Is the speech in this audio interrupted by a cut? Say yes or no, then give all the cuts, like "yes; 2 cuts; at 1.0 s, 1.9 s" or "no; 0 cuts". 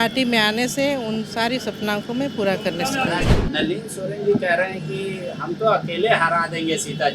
yes; 1 cut; at 3.4 s